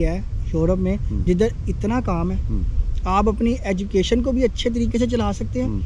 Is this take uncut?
yes; 0 cuts

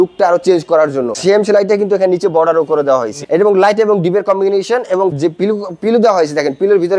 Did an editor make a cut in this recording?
yes; 2 cuts; at 1.2 s, 3.2 s

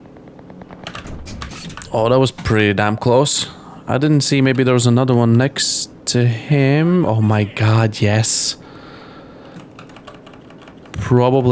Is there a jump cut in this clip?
yes; 1 cut; at 10.0 s

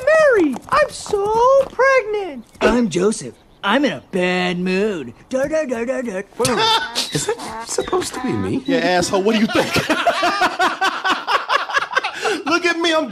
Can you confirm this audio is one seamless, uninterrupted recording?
yes; 0 cuts

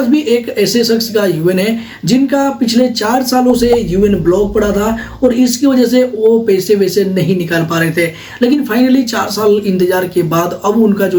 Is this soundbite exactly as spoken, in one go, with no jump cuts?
yes; 0 cuts

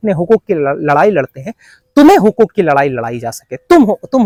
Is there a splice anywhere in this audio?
no; 0 cuts

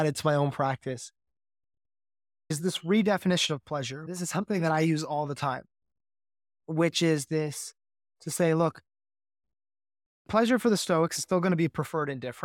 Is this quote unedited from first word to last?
no; 2 cuts; at 2.6 s, 4.0 s

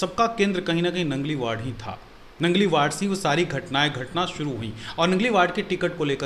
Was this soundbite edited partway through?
no; 0 cuts

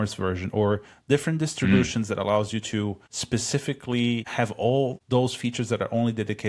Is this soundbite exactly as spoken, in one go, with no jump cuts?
no; 2 cuts; at 3.1 s, 5.0 s

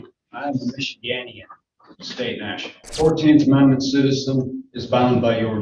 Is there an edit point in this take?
yes; 1 cut; at 2.8 s

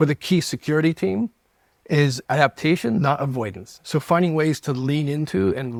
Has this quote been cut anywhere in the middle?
no; 0 cuts

